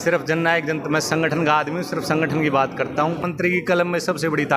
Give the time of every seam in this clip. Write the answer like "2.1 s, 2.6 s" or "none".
3.3 s